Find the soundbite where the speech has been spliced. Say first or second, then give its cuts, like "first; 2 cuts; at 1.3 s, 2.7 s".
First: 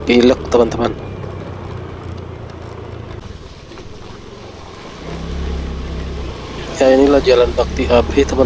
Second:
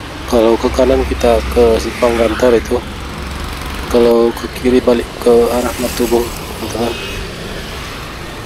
first; 1 cut; at 3.2 s